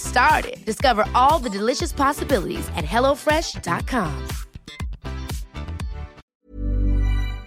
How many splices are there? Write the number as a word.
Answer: one